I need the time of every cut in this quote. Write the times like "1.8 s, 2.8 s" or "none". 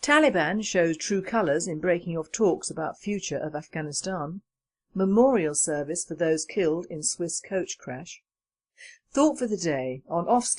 none